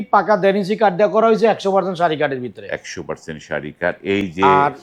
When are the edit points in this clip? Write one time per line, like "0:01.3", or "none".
none